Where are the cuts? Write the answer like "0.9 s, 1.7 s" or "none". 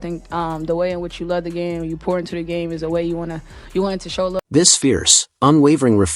4.5 s